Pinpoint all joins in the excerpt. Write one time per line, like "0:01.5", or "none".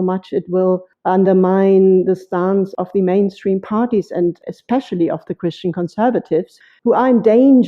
0:00.9
0:02.7
0:06.5